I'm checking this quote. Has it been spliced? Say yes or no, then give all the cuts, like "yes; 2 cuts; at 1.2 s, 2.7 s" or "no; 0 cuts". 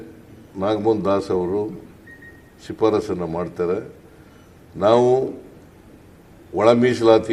no; 0 cuts